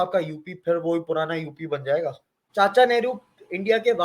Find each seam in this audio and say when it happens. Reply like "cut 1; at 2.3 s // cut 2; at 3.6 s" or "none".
cut 1; at 2.3 s